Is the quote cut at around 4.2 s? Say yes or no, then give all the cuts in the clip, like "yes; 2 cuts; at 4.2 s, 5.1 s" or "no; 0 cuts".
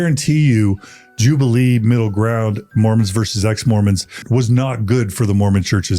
yes; 1 cut; at 4.2 s